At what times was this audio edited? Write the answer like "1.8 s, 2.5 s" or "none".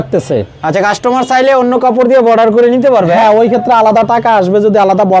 none

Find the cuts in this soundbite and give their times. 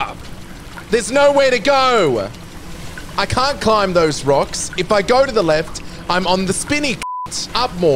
7.0 s

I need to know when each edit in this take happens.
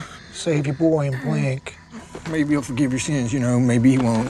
2.1 s

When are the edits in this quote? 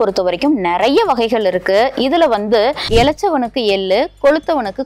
2.8 s

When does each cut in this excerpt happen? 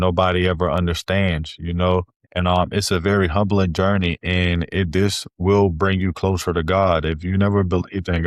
2.3 s

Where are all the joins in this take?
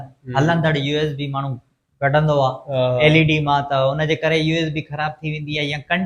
none

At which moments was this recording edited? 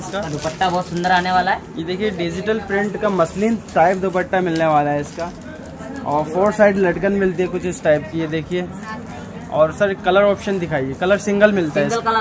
none

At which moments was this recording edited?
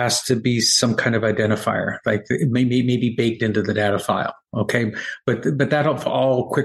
none

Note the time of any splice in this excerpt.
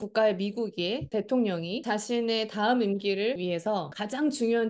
1.1 s, 1.8 s, 3.6 s

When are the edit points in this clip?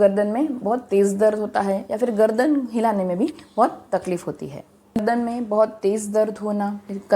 5.0 s

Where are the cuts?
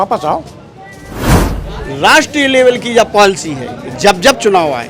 1.4 s

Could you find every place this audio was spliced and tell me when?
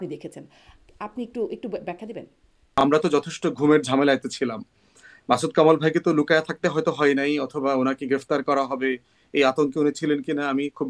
2.6 s

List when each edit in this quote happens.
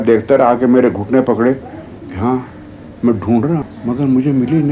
3.7 s

